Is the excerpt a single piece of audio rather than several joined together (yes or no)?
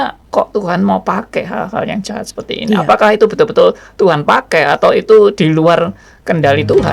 yes